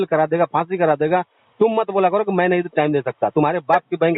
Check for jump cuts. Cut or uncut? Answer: uncut